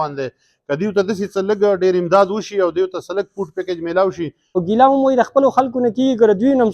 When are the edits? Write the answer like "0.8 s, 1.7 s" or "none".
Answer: 4.6 s